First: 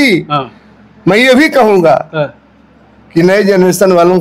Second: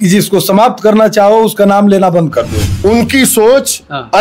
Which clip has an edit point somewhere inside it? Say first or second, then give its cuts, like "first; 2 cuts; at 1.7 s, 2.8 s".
second; 1 cut; at 2.6 s